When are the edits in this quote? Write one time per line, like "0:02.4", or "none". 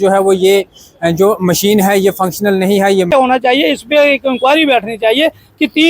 0:03.1

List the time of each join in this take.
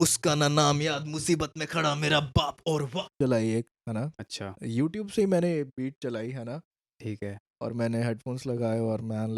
0:03.1

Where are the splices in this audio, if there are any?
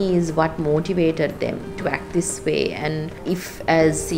0:03.2

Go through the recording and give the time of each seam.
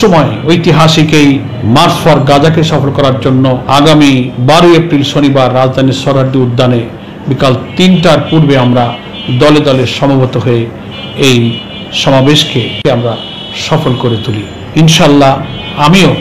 0:01.5
0:03.6
0:04.3
0:12.8
0:14.6

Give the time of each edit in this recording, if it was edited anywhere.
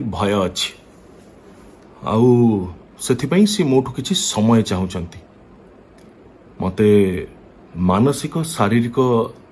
none

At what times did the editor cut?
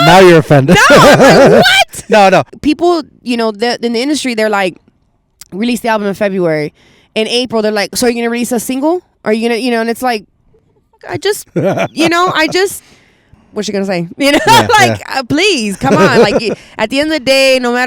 0:02.5
0:13.3

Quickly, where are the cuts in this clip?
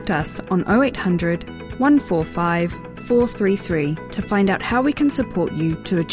none

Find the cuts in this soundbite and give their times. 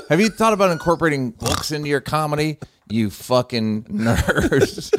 0:01.4
0:03.9

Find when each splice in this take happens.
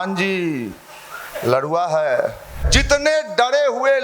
0:02.7

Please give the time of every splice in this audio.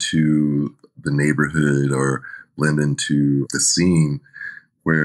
0:03.5

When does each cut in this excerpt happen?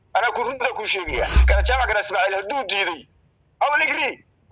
0:01.4

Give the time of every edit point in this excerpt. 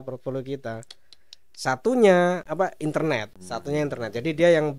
0:02.5
0:03.4

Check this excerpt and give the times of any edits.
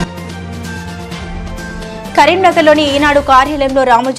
0:01.6

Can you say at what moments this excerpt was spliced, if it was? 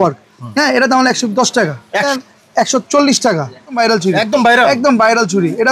0:02.1
0:03.8

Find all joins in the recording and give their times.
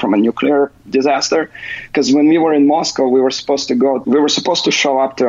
0:04.0

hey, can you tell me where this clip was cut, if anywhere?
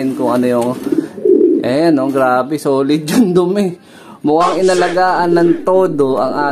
none

